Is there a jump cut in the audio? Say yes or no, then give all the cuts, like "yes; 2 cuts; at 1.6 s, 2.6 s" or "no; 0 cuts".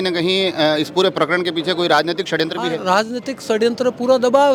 no; 0 cuts